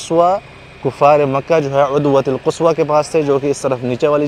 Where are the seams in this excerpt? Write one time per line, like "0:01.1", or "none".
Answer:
none